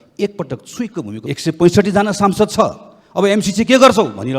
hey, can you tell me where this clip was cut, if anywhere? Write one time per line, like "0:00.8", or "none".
0:01.2